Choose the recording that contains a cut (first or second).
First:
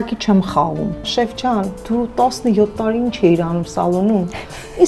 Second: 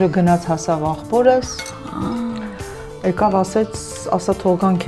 first